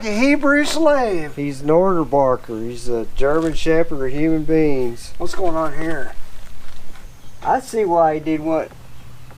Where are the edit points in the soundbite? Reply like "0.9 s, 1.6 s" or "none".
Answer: 7.2 s

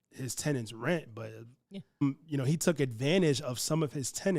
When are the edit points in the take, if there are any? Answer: 2.0 s

